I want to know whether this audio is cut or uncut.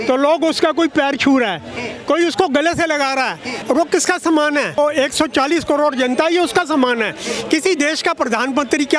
uncut